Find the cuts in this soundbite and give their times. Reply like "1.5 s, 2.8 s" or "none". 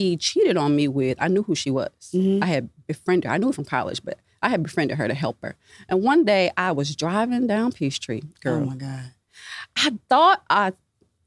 none